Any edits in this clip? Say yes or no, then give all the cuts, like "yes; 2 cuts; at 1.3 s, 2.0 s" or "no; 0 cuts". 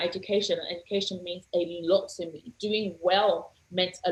no; 0 cuts